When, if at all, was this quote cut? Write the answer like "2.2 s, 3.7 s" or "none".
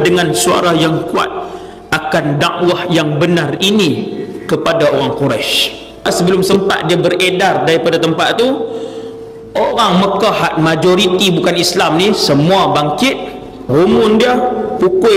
6.1 s